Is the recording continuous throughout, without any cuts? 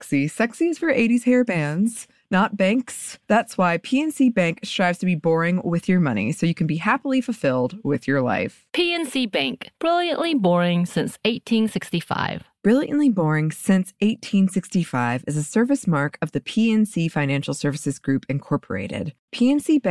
yes; 0 cuts

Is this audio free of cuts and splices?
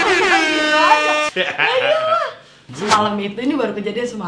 no; 1 cut; at 2.6 s

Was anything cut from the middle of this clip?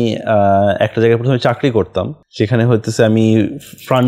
yes; 1 cut; at 2.2 s

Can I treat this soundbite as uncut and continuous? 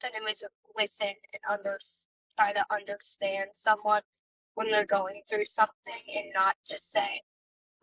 yes; 0 cuts

